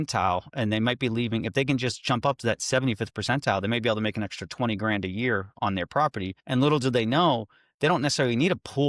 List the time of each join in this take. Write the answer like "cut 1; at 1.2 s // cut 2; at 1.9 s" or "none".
cut 1; at 6.4 s